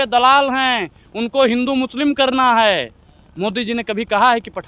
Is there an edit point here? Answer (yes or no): no